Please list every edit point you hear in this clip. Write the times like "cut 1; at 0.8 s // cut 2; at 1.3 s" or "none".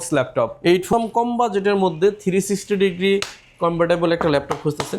cut 1; at 0.9 s